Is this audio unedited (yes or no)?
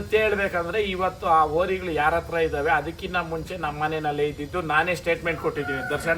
yes